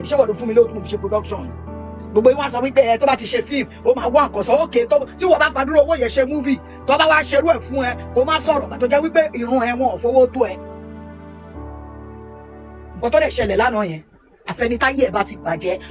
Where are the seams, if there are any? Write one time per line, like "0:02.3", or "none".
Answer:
none